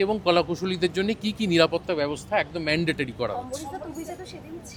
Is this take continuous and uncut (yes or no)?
yes